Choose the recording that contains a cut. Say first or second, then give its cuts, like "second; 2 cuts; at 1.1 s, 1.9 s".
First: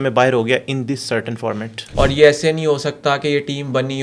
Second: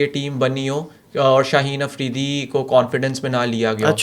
first; 1 cut; at 1.8 s